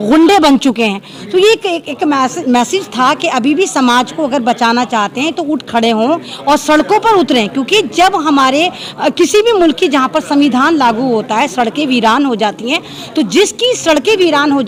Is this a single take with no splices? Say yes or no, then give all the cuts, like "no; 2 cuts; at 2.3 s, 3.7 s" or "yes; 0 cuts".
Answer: yes; 0 cuts